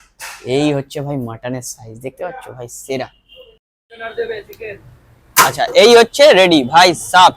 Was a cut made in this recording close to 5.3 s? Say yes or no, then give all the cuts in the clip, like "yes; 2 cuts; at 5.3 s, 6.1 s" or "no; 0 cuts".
no; 1 cut; at 3.7 s